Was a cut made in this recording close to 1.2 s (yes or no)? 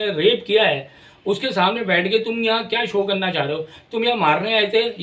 no